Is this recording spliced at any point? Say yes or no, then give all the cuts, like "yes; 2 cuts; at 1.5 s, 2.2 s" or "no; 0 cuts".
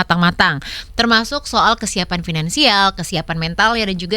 no; 0 cuts